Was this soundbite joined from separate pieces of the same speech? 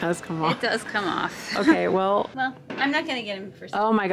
yes; 1 cut; at 2.3 s

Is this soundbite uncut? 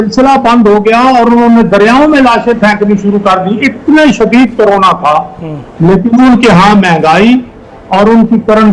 yes; 0 cuts

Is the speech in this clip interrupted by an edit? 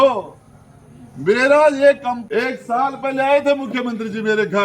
yes; 1 cut; at 2.1 s

